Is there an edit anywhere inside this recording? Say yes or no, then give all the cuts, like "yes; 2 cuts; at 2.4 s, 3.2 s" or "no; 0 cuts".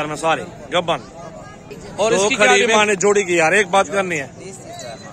yes; 1 cut; at 2.6 s